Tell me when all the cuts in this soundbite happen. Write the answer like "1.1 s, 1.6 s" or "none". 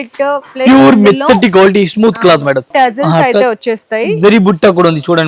2.7 s